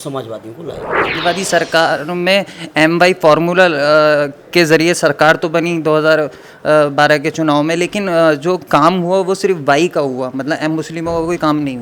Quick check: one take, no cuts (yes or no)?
no